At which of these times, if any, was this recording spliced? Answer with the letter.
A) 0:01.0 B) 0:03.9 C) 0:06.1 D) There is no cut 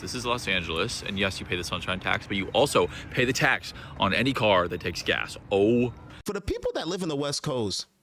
C